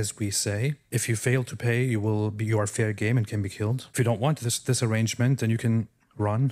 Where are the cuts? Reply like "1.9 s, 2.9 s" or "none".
0.8 s, 3.8 s